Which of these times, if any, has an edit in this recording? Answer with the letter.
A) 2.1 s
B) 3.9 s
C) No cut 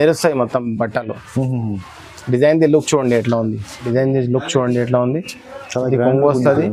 B